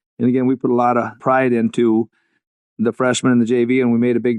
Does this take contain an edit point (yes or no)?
yes